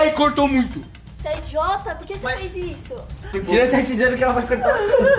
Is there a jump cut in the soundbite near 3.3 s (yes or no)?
yes